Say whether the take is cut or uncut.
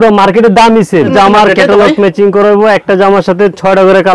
cut